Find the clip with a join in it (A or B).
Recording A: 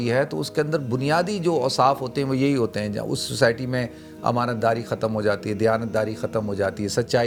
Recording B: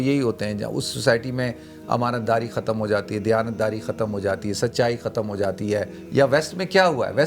B